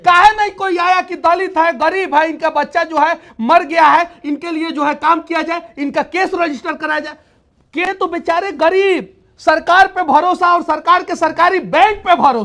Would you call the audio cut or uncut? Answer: cut